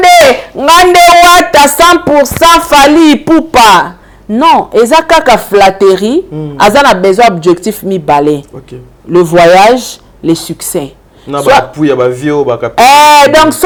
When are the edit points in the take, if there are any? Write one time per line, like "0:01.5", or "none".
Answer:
none

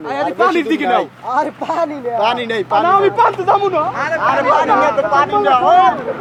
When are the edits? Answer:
none

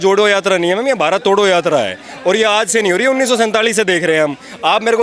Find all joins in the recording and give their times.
none

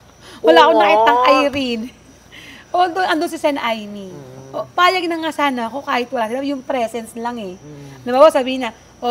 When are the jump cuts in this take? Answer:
none

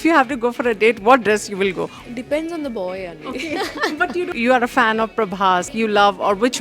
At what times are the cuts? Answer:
0:01.9
0:04.3
0:05.7

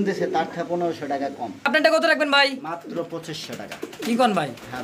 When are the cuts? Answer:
0:01.7

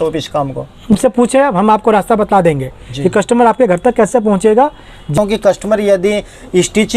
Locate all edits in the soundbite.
0:00.9
0:05.1

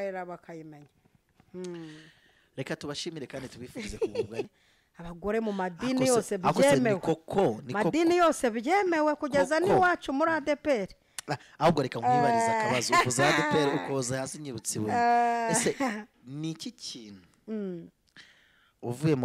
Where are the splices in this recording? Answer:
0:04.5

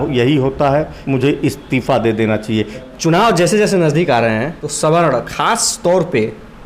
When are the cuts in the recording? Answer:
0:01.0
0:02.9
0:04.6

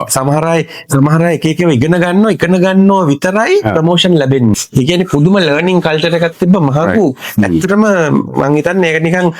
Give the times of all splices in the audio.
0:04.6

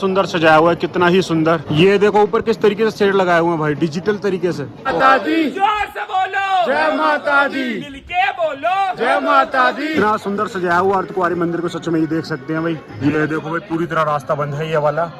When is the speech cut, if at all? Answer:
0:01.8
0:04.9
0:09.9
0:12.9

